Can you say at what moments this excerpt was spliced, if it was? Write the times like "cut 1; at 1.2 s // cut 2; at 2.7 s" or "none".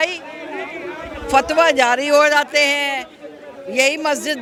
none